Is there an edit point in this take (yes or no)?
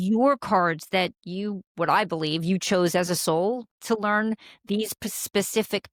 no